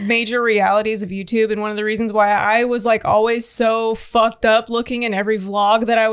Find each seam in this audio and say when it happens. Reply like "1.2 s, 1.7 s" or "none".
none